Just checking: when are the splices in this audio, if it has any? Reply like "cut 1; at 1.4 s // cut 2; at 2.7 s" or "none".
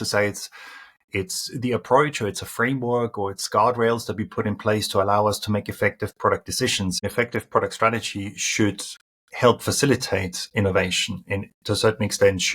cut 1; at 7.0 s